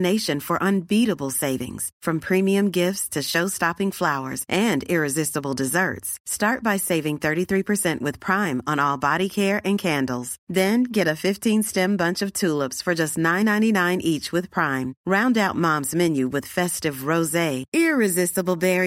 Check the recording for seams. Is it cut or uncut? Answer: uncut